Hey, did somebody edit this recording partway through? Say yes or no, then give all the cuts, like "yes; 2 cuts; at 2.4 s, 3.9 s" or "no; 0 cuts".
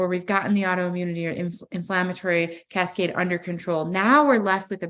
no; 0 cuts